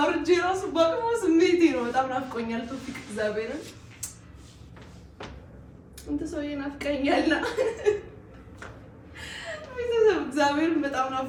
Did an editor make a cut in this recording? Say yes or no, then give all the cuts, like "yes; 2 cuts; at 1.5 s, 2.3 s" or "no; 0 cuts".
no; 0 cuts